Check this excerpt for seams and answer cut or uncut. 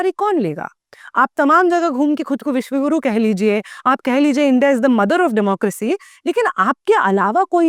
uncut